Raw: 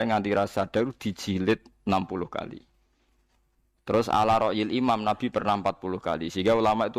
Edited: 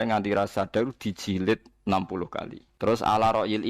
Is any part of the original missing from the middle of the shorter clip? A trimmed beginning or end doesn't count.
yes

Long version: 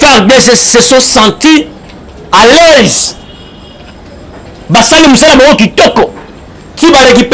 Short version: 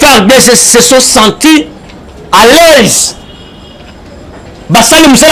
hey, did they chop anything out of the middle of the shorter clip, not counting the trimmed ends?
no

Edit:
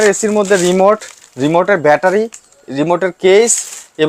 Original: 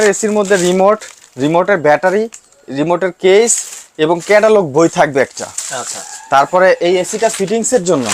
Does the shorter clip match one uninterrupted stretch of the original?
yes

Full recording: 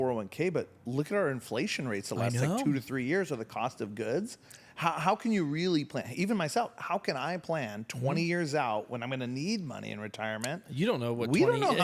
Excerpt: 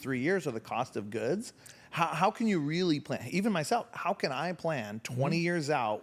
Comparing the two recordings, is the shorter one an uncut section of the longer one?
yes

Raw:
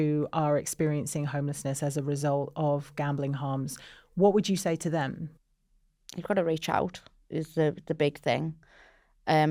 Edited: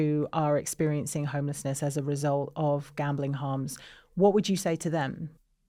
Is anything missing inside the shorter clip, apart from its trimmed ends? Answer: no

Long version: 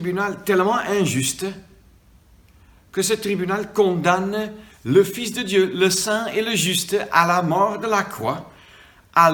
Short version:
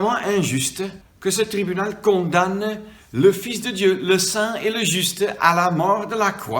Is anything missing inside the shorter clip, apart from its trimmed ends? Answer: yes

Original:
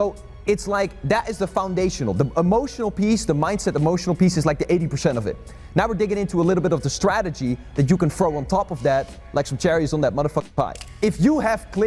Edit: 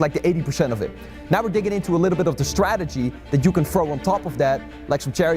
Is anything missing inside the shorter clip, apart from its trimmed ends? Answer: no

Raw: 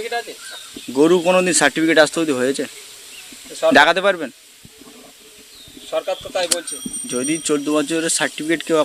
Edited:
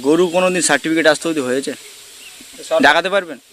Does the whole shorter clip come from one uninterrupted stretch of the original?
yes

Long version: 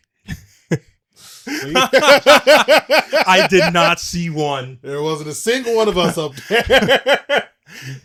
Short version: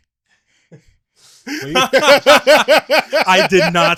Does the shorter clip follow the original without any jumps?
yes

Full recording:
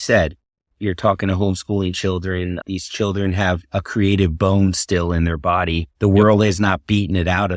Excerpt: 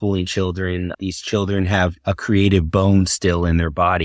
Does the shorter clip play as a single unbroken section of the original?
yes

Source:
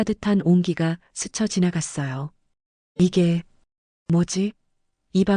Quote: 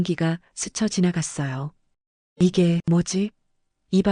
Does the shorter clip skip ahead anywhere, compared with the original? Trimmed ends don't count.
yes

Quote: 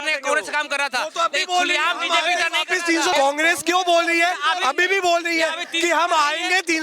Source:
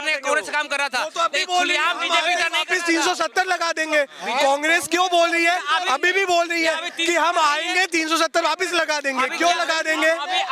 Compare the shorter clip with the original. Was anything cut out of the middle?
yes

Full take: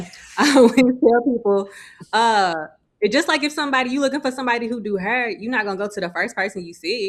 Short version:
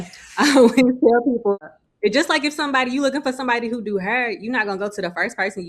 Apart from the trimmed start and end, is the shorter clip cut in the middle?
yes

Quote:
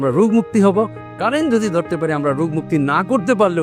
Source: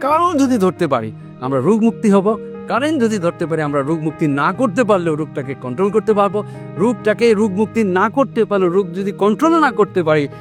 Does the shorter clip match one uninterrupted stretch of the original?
yes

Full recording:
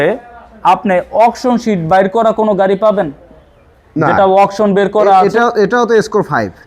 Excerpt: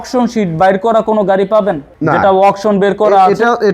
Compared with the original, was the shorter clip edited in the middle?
yes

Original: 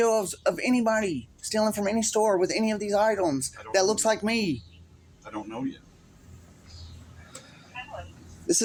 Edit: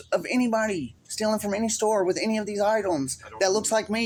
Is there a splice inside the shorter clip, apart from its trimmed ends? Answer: no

